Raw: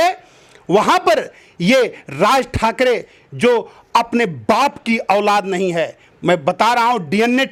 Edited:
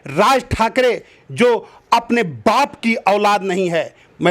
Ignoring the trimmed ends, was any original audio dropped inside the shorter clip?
no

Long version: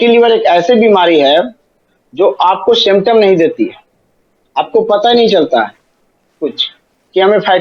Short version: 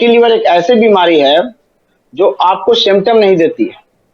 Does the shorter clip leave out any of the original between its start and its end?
no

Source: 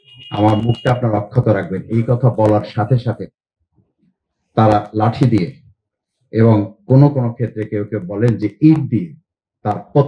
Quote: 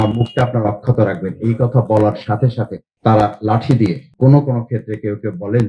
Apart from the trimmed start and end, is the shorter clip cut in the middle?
yes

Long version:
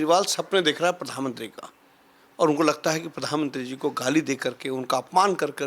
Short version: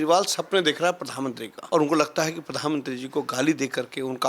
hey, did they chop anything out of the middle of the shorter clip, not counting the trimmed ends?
yes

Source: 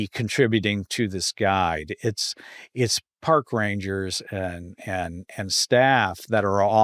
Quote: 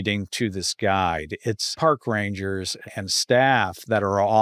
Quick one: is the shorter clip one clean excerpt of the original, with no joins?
no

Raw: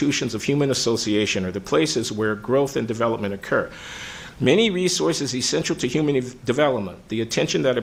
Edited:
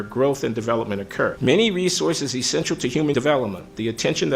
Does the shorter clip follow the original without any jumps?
no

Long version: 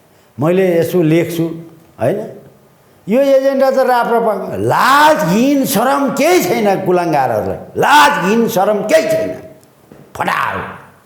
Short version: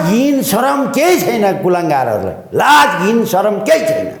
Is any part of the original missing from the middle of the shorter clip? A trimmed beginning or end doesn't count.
no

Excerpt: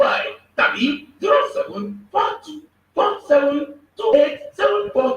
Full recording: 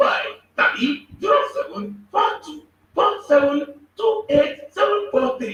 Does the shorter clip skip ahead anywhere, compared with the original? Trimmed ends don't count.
yes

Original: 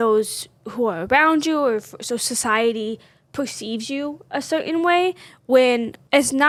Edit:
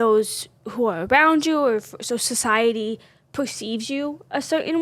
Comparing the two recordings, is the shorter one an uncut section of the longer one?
yes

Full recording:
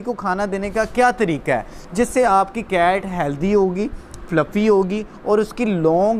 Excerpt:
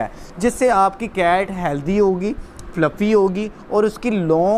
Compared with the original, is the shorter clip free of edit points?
yes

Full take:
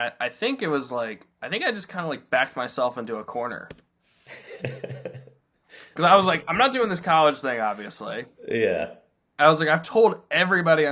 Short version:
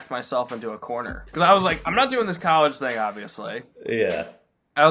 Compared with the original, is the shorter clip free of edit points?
no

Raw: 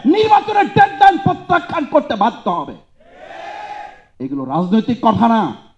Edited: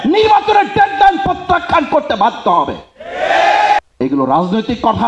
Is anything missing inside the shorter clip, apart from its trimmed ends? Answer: yes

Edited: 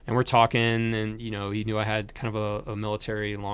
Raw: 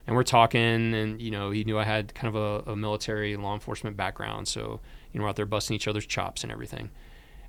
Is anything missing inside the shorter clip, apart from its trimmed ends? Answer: no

